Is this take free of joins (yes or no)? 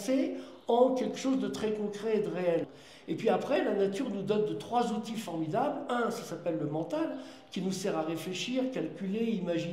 yes